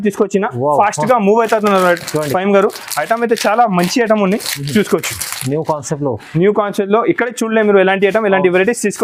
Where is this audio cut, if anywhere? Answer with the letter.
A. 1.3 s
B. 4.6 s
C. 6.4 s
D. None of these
D